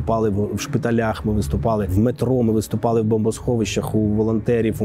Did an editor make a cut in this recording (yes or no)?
yes